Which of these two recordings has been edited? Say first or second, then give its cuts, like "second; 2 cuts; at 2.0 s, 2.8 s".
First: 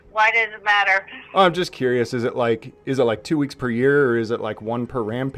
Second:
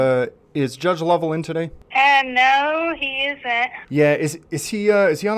second; 2 cuts; at 1.8 s, 3.8 s